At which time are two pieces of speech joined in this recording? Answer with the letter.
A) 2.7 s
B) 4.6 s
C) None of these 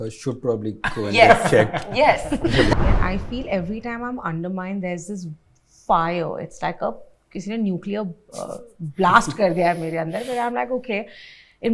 A